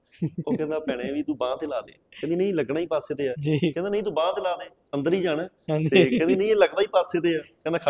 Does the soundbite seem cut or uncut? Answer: uncut